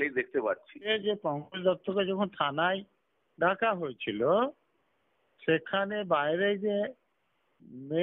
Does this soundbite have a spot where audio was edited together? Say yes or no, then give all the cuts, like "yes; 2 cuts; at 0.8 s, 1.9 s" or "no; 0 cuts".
yes; 1 cut; at 0.9 s